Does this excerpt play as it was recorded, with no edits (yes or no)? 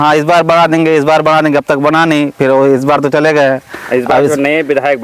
yes